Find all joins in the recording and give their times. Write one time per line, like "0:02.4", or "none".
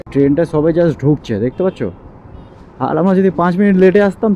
none